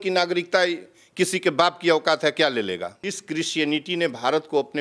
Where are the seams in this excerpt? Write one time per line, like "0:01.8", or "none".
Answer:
0:03.0